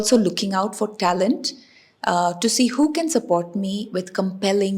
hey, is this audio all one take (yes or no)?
yes